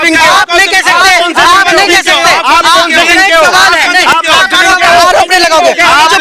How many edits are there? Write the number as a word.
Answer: zero